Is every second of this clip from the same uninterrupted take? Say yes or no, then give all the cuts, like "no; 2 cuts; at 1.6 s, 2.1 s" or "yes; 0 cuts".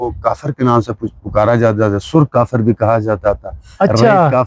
yes; 0 cuts